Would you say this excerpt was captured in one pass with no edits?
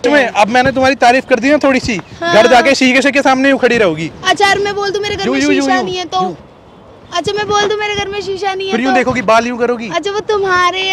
yes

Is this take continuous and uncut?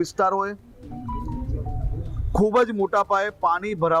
yes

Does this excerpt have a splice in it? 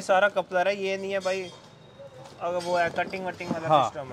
no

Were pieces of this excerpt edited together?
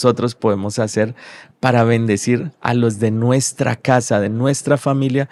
no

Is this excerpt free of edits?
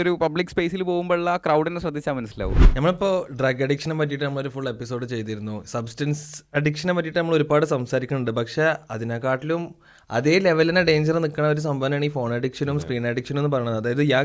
no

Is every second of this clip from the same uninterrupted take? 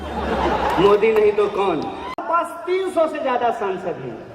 no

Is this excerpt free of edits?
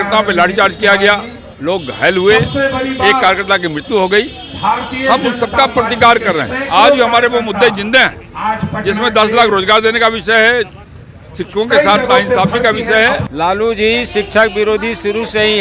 no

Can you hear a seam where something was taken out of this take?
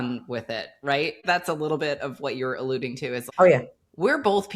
yes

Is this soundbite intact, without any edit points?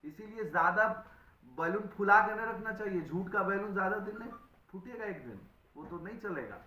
yes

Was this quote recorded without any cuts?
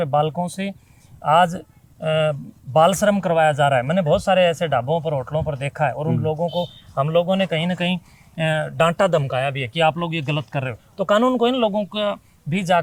yes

